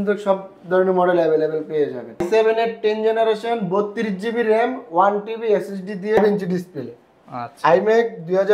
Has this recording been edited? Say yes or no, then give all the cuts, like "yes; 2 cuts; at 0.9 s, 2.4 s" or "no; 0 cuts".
yes; 2 cuts; at 2.2 s, 6.2 s